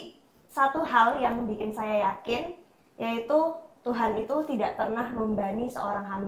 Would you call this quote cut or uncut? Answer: uncut